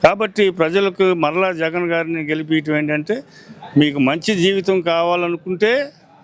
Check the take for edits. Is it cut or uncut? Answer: uncut